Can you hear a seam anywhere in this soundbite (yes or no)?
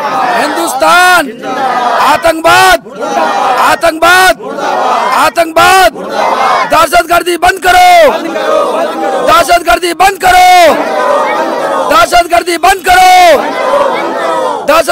no